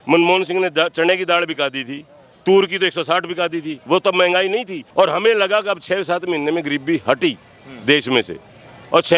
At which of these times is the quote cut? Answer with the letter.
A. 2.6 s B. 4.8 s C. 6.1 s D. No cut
B